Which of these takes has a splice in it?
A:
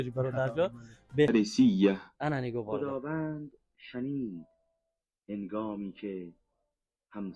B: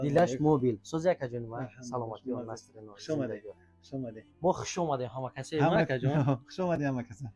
A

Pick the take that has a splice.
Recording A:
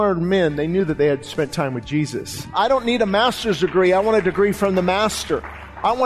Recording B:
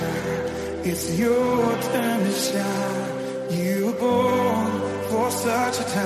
A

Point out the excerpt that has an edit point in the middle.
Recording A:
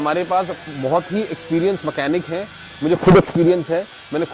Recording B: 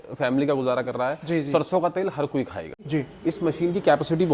B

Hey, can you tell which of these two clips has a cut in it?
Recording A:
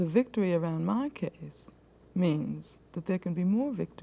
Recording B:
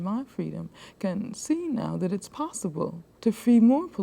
B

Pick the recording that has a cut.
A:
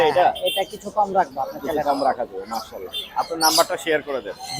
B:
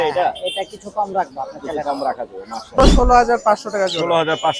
B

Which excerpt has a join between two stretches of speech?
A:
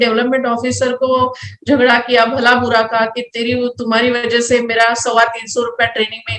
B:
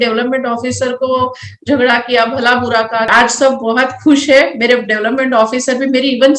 B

